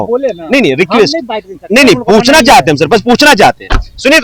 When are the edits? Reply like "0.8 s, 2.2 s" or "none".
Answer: none